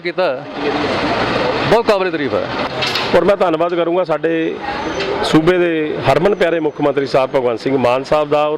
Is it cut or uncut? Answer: uncut